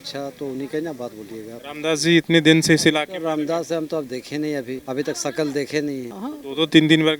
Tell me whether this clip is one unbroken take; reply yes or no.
yes